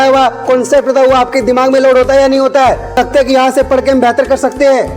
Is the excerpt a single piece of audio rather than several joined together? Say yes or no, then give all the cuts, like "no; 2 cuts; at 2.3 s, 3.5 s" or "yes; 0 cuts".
no; 1 cut; at 3.0 s